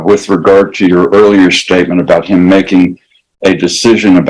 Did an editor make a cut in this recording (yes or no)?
no